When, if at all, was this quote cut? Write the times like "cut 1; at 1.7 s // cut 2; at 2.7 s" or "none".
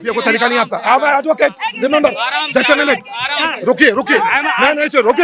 none